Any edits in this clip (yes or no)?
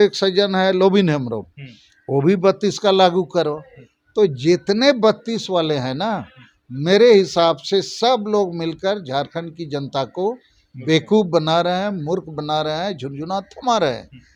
no